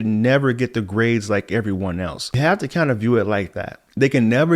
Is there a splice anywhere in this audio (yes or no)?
yes